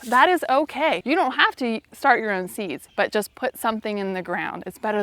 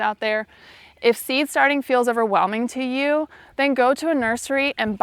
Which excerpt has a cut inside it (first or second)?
first